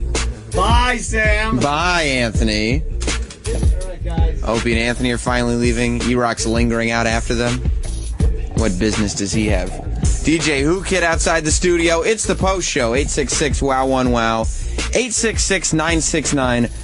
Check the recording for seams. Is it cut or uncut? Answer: uncut